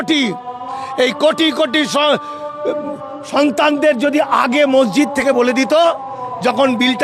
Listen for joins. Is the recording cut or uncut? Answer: uncut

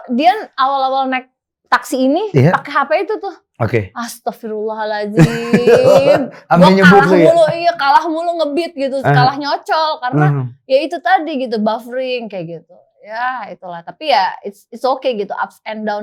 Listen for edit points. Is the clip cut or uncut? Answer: uncut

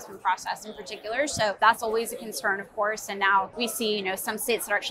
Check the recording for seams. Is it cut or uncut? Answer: cut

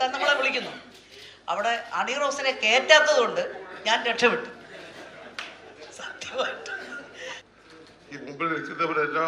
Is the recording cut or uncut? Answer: cut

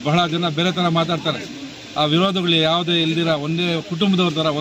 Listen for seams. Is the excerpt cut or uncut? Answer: uncut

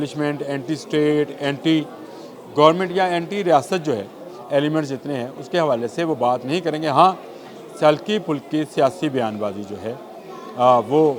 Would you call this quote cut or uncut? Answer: uncut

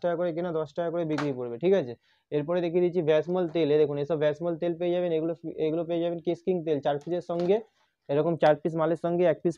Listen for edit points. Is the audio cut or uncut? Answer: uncut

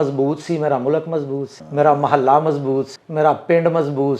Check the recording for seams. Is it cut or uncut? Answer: cut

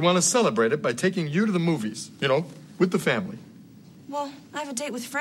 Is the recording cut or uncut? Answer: uncut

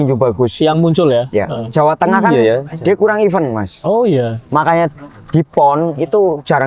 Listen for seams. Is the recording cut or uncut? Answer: uncut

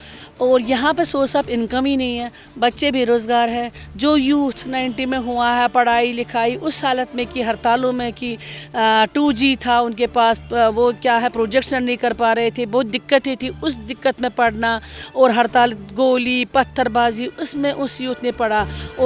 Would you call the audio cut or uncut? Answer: uncut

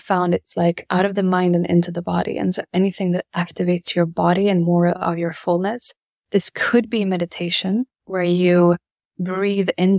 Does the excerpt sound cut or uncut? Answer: cut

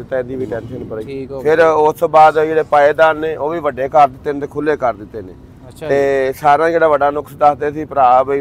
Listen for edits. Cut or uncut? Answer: cut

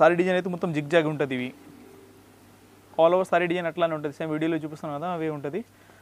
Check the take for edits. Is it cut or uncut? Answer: uncut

